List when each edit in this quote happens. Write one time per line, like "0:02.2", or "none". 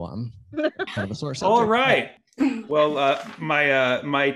0:02.2